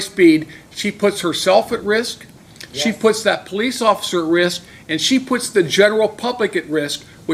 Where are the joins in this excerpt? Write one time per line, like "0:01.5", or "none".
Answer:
none